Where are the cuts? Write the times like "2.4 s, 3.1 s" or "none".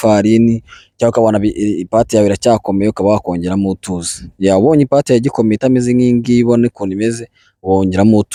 none